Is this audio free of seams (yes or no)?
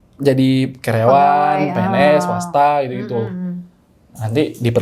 yes